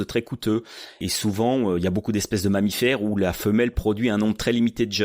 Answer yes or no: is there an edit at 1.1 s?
yes